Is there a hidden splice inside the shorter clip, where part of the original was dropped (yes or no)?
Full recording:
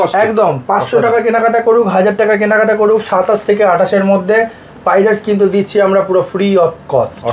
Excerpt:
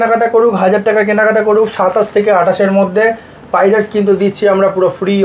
no